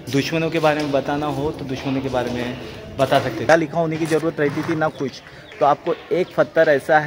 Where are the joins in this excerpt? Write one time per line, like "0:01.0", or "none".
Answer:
0:03.5